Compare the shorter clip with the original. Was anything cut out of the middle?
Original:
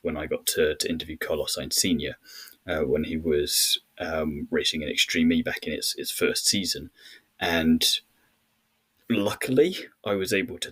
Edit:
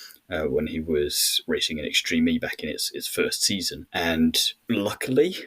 yes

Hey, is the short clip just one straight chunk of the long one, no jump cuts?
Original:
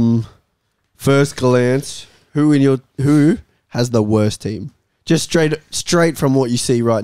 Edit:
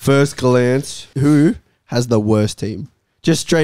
no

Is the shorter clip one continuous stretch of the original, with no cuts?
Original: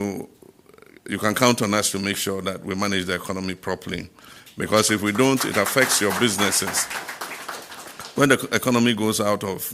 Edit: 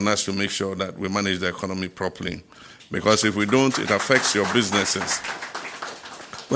yes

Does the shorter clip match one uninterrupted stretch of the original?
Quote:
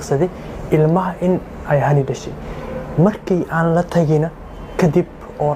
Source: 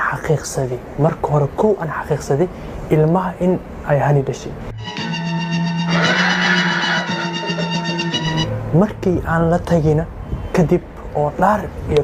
no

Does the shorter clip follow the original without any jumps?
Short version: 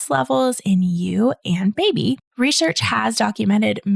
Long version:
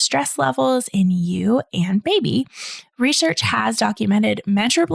no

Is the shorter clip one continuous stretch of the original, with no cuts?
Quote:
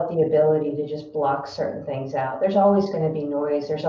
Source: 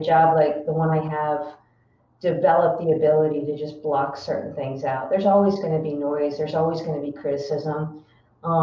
yes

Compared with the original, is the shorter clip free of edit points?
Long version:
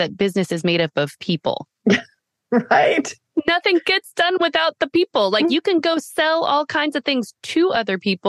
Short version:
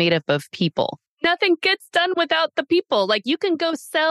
no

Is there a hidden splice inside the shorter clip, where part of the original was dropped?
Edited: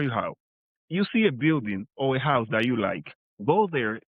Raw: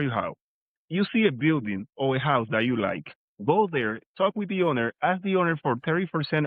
no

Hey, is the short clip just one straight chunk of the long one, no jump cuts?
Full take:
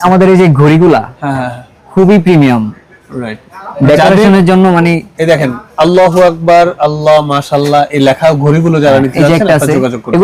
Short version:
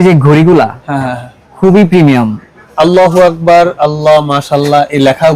no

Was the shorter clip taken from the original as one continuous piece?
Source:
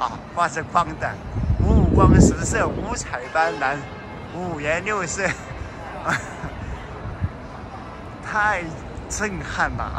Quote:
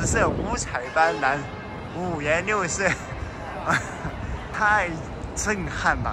no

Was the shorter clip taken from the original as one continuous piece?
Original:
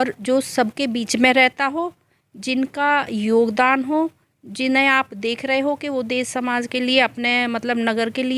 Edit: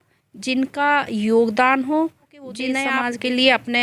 no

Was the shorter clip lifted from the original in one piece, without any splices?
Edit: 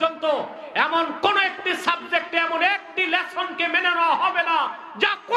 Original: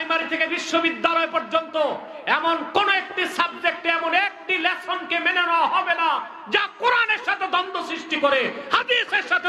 yes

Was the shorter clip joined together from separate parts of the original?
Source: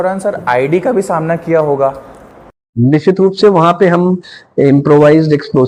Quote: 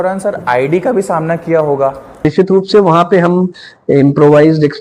yes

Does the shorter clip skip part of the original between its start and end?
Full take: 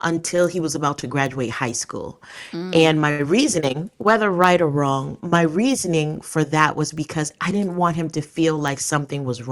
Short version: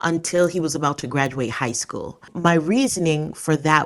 yes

